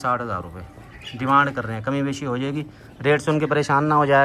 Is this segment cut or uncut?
uncut